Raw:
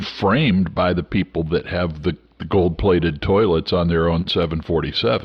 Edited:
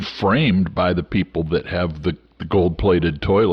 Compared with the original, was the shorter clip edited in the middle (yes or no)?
no